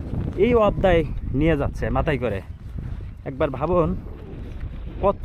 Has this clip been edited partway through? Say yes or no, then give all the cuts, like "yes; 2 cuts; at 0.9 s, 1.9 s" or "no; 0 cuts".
no; 0 cuts